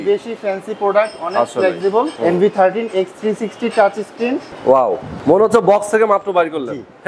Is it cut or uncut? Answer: cut